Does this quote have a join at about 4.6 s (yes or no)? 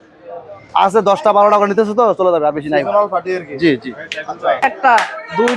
yes